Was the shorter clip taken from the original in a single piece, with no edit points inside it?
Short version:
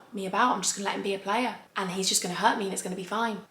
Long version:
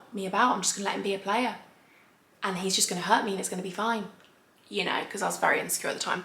no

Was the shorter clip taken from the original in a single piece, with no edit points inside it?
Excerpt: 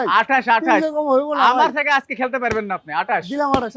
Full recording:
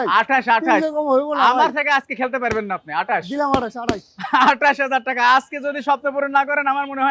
yes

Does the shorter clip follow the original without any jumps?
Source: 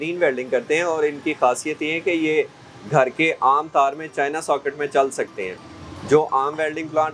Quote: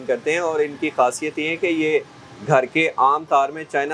yes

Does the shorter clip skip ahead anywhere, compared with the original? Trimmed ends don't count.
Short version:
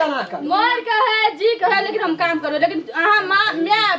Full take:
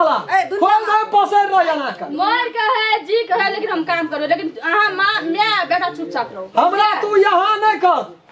no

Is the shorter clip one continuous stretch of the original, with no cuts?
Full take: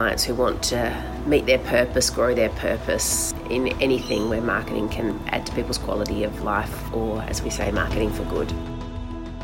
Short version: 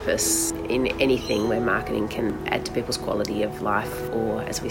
yes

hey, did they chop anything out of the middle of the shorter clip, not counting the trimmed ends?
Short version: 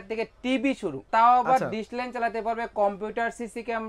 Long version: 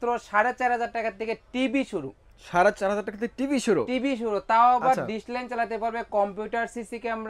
yes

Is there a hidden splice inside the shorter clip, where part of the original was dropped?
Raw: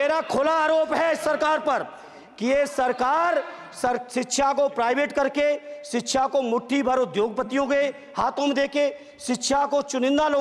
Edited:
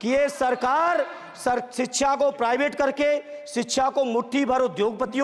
no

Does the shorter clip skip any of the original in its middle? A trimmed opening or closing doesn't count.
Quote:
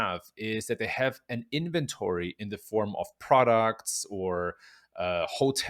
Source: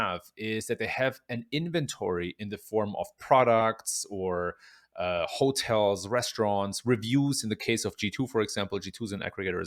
no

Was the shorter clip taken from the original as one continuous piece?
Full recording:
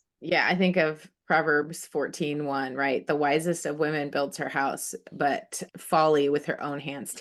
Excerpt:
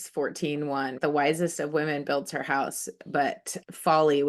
no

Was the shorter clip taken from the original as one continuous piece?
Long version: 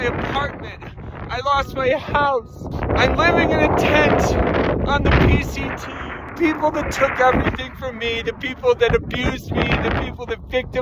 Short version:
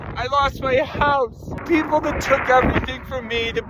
no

